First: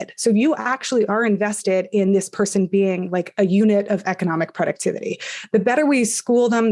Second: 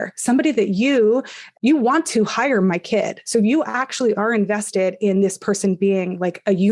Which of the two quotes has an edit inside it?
second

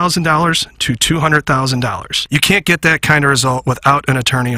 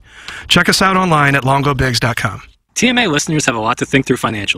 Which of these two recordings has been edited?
second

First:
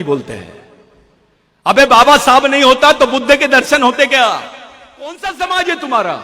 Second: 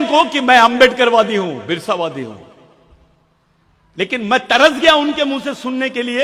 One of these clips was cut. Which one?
first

